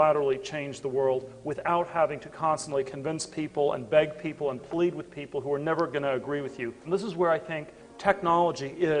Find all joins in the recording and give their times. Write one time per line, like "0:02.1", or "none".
none